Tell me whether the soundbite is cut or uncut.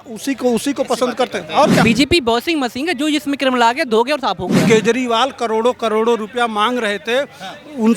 cut